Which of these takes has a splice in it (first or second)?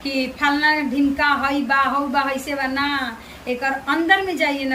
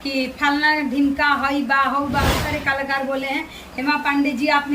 second